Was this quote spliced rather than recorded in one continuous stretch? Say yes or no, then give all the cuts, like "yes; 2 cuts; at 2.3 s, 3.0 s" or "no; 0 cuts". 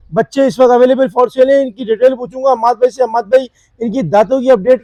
no; 0 cuts